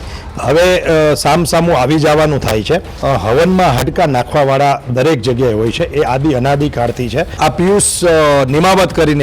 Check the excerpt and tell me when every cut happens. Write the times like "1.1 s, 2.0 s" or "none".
2.9 s, 7.3 s